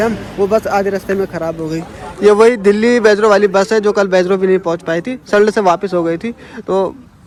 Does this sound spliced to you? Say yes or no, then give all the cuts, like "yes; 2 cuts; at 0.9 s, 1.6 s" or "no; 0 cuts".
no; 0 cuts